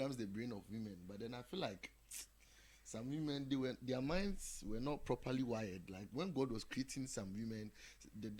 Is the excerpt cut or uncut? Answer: uncut